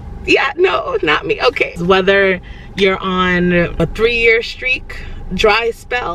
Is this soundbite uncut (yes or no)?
no